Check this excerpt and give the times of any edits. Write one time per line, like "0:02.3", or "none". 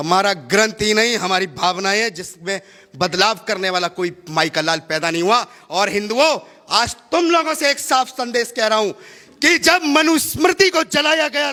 none